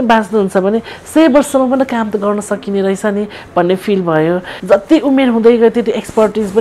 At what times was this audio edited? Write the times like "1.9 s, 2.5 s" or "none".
4.5 s